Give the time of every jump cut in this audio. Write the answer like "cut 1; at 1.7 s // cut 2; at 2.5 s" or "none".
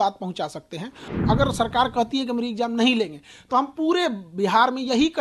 cut 1; at 1.1 s